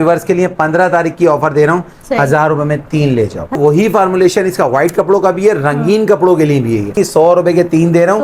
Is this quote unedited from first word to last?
no; 2 cuts; at 3.6 s, 7.0 s

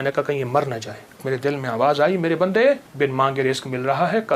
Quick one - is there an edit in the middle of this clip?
yes; 2 cuts; at 1.2 s, 2.9 s

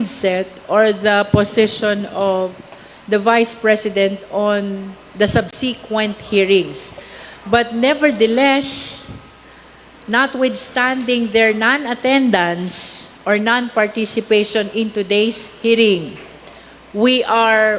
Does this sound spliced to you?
no; 0 cuts

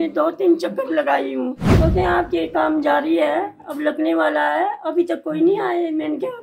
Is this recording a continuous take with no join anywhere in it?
no; 1 cut; at 1.6 s

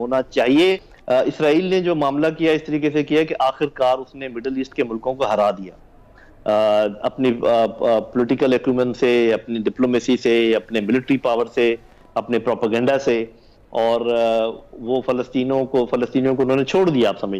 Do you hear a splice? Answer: yes; 1 cut; at 0.9 s

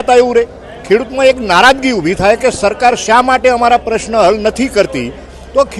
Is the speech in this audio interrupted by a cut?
no; 0 cuts

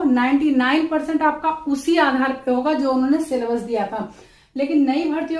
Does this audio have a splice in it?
no; 0 cuts

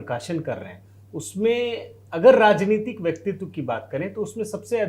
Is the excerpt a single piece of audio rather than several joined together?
yes; 0 cuts

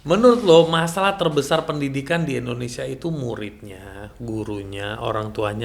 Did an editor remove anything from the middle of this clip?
no; 0 cuts

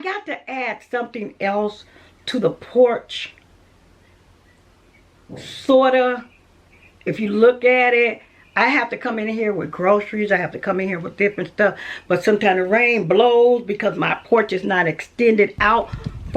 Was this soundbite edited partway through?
no; 0 cuts

